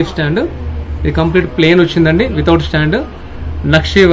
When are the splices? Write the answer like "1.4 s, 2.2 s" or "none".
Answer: none